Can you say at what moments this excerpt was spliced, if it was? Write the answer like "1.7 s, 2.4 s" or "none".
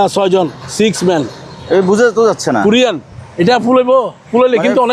none